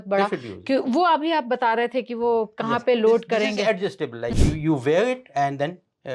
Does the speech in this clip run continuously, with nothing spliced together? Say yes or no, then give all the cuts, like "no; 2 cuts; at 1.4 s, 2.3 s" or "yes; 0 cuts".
no; 1 cut; at 4.3 s